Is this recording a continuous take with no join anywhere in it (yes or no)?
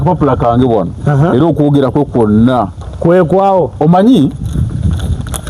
yes